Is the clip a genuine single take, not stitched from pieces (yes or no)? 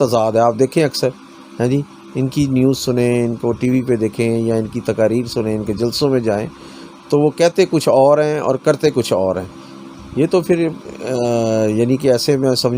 yes